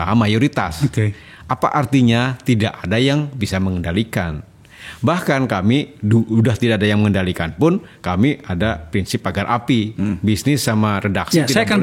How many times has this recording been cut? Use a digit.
0